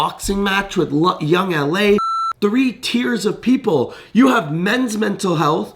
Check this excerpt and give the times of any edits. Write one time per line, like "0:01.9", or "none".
0:02.2